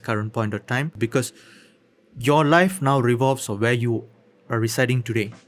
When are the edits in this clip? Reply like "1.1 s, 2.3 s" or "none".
1.0 s